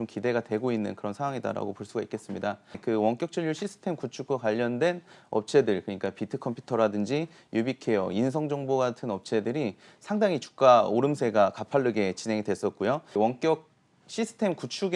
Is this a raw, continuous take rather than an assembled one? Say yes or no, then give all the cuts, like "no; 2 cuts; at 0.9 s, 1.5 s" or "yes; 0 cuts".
no; 2 cuts; at 2.8 s, 13.2 s